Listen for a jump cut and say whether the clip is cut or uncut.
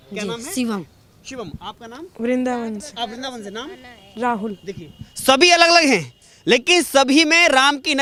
uncut